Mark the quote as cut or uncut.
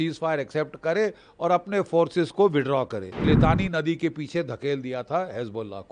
cut